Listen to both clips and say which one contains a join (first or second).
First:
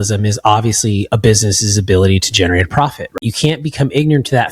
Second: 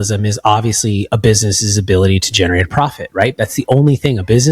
first